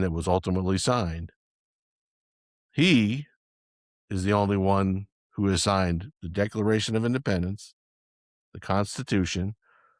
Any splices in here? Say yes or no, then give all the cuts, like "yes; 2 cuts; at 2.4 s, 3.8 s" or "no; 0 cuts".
no; 0 cuts